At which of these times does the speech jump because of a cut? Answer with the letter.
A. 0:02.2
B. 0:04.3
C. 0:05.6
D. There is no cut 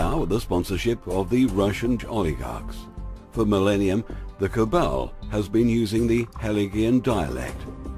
A